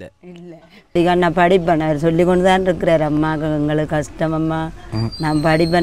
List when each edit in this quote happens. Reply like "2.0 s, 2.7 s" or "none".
0.9 s